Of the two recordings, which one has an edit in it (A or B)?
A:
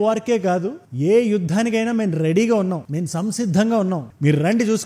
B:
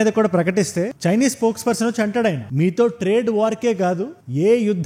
B